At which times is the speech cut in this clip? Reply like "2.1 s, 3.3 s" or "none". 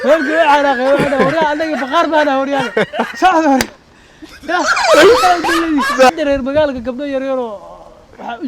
6.1 s